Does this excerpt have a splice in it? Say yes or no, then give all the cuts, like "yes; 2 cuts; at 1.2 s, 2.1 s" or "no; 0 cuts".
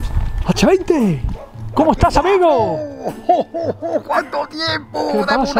no; 0 cuts